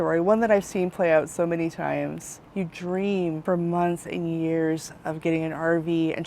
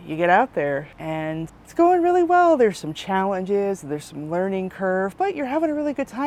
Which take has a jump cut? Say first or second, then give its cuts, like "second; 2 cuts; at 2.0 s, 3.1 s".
first; 1 cut; at 3.4 s